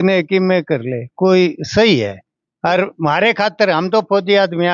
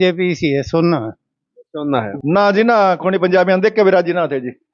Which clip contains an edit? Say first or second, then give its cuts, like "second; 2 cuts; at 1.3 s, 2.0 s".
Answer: second; 1 cut; at 2.1 s